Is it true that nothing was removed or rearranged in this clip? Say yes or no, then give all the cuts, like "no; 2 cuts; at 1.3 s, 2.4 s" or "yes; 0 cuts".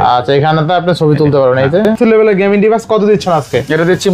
no; 1 cut; at 1.9 s